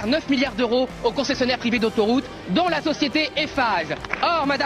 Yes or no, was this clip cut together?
no